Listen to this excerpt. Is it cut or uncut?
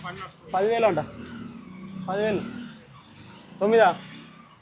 uncut